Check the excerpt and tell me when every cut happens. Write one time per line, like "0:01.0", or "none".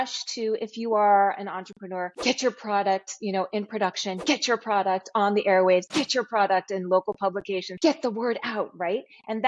0:02.1
0:07.7